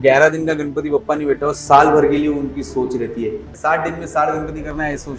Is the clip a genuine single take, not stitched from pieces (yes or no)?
no